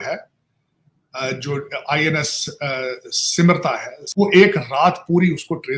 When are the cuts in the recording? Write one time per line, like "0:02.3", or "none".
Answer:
0:04.0